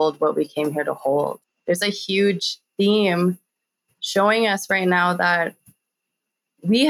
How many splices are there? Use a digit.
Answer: 1